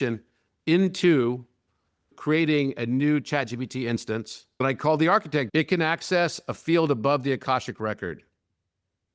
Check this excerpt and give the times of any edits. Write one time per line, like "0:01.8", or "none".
0:02.1
0:04.4
0:05.5

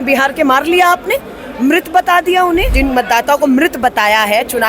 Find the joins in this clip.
0:02.8

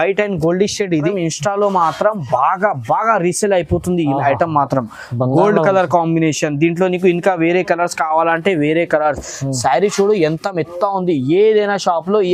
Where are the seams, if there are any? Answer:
0:01.1

